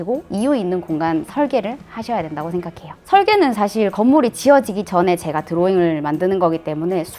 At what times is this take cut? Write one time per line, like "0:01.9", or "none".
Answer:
0:03.0